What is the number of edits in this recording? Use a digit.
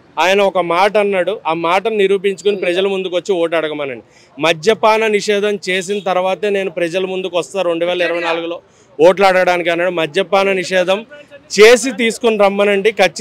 0